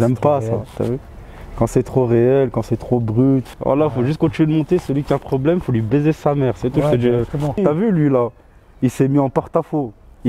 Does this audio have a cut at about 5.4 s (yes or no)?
no